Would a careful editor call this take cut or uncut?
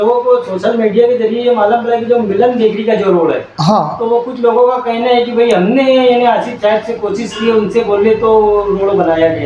uncut